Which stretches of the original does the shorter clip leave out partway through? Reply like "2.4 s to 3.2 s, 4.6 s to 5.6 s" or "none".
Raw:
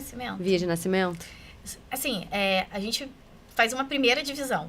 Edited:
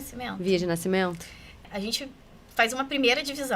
1.7 s to 2.7 s